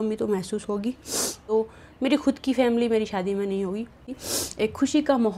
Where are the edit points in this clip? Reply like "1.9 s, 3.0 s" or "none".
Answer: 1.4 s, 4.1 s

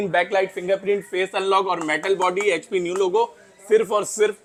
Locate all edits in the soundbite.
none

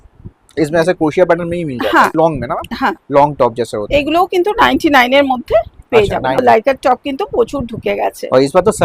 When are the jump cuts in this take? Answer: 2.1 s, 6.4 s

